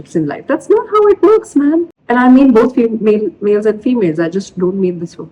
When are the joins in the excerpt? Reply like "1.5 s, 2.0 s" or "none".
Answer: none

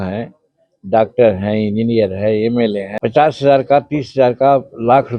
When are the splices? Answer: 2.9 s

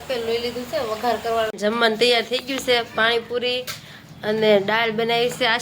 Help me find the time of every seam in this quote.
1.5 s

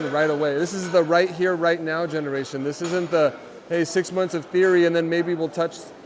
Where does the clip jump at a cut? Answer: none

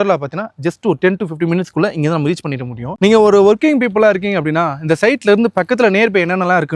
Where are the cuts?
none

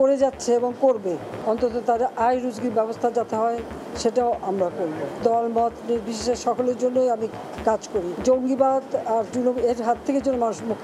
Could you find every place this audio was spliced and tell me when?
1.3 s, 5.2 s, 8.2 s

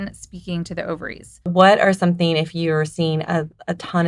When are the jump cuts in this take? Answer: 1.5 s

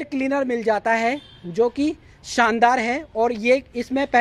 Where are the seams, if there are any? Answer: none

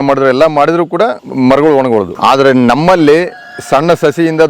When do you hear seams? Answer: 1.2 s, 2.1 s

